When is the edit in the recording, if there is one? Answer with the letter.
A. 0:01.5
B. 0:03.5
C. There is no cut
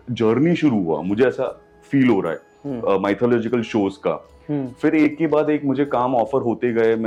C